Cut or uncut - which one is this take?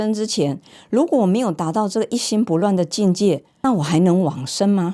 uncut